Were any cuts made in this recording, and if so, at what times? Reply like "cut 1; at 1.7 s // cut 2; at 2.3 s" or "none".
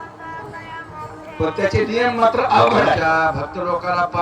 cut 1; at 3.0 s